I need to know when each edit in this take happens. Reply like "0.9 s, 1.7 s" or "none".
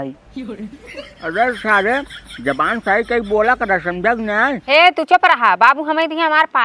4.6 s